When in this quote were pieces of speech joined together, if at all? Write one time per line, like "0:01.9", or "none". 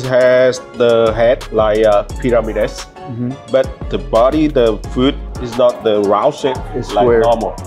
0:03.8
0:05.8